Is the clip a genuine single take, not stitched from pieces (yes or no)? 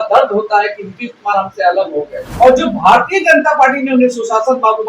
no